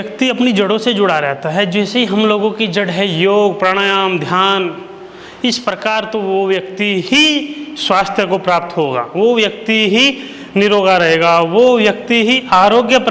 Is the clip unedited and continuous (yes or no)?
yes